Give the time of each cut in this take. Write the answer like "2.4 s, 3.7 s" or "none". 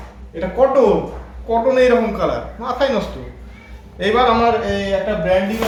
none